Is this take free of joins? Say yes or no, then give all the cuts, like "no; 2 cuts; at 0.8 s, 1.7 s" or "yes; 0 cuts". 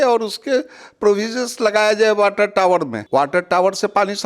no; 1 cut; at 3.0 s